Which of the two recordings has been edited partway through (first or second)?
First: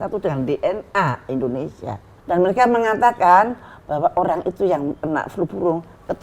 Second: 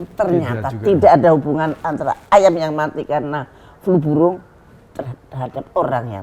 first